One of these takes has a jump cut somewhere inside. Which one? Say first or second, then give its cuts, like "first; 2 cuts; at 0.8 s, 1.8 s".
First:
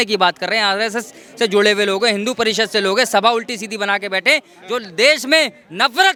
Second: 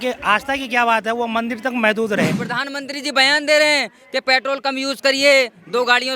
second; 1 cut; at 2.4 s